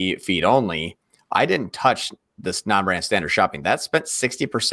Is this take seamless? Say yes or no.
yes